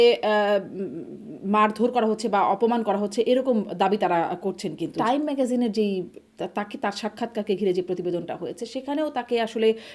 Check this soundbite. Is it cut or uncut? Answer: cut